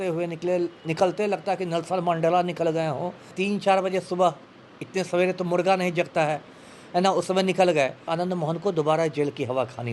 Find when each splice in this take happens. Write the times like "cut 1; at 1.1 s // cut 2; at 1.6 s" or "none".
cut 1; at 3.3 s // cut 2; at 8.1 s